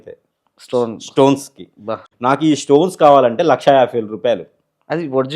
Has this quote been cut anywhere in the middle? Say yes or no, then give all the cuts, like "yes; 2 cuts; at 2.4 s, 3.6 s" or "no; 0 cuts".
yes; 1 cut; at 2.1 s